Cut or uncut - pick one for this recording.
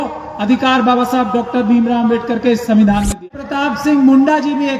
cut